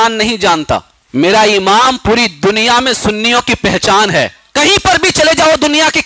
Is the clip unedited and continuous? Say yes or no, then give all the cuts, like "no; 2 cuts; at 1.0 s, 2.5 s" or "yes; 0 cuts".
no; 2 cuts; at 1.0 s, 4.4 s